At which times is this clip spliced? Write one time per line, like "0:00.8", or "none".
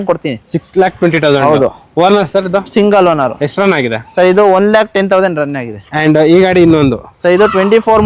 none